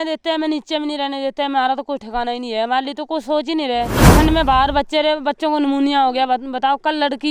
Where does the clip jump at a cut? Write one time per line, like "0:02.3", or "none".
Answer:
0:04.1